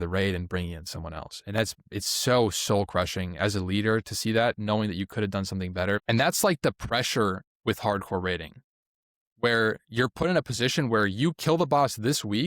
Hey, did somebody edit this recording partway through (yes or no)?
yes